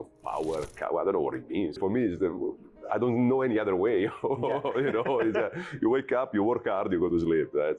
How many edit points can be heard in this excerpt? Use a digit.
1